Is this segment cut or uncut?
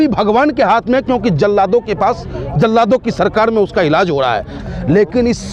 cut